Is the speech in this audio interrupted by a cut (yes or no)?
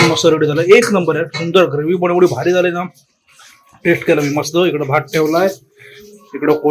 no